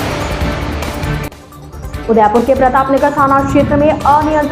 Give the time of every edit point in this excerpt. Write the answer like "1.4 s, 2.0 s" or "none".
1.3 s